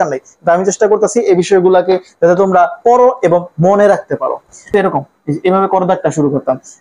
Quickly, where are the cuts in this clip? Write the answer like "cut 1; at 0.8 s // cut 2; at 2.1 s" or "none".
cut 1; at 4.6 s